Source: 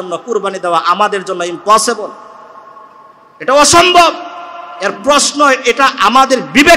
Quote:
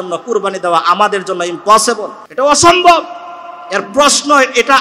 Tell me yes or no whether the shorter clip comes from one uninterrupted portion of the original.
no